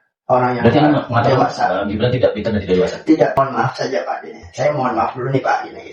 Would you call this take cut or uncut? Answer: cut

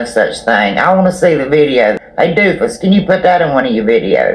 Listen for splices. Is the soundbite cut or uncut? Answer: cut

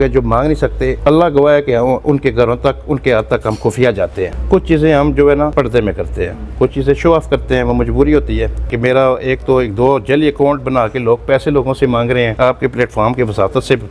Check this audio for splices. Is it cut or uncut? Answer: cut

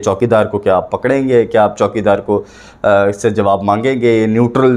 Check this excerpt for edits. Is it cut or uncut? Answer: uncut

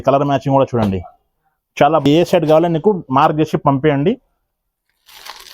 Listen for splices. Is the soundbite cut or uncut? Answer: cut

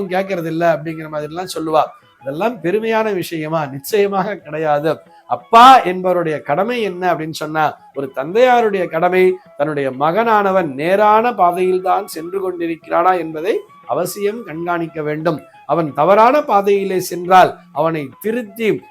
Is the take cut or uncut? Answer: uncut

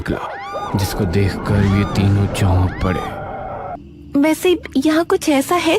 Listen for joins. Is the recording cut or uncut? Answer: cut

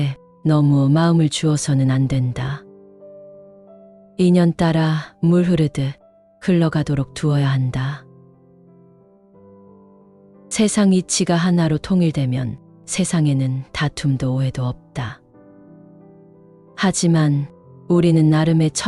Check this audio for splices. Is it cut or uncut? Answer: cut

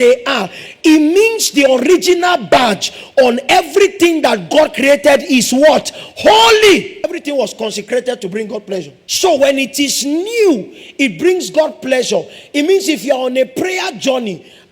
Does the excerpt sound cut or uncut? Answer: cut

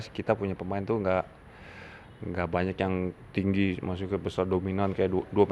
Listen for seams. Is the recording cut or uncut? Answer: uncut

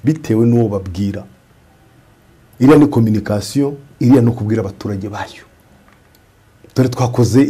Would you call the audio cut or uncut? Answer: uncut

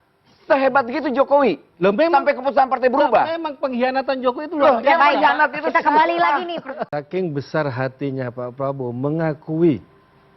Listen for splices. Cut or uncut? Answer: cut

